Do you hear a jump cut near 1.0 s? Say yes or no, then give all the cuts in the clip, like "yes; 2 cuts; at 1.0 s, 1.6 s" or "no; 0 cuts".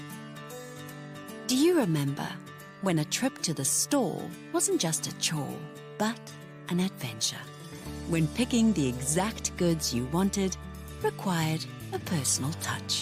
yes; 1 cut; at 1.0 s